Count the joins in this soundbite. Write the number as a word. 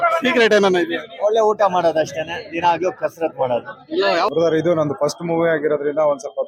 one